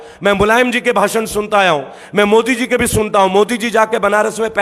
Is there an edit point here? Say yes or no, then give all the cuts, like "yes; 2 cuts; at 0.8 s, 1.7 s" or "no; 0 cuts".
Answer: no; 0 cuts